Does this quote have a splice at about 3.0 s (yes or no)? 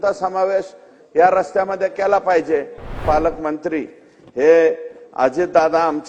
yes